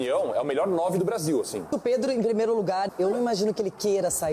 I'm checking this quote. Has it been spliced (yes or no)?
yes